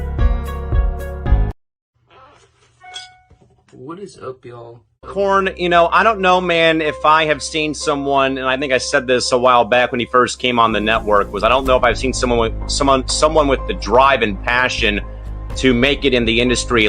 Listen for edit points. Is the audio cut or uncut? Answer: cut